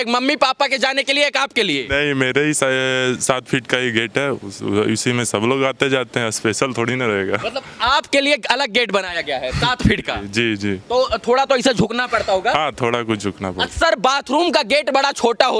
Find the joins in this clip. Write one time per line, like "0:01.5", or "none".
none